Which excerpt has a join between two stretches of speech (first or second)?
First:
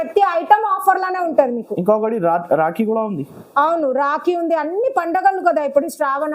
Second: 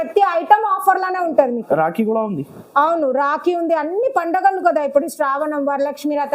second